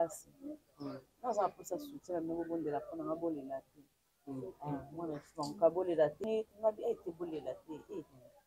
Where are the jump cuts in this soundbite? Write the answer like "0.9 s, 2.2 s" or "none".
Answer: 6.2 s